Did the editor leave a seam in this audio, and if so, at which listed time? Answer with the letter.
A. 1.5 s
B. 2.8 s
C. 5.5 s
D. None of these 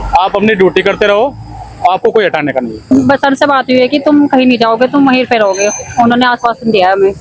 B